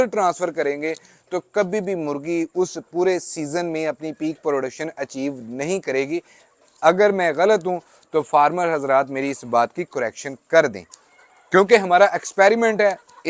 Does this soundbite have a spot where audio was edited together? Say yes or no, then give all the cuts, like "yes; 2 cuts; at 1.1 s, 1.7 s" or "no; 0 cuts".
no; 0 cuts